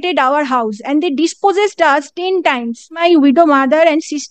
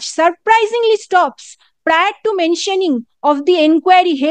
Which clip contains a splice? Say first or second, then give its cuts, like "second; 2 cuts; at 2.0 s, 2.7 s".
first; 1 cut; at 2.9 s